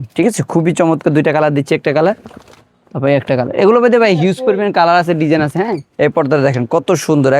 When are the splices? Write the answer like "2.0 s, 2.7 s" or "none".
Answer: 5.8 s